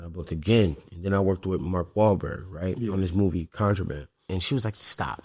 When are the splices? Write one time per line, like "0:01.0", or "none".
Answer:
0:04.2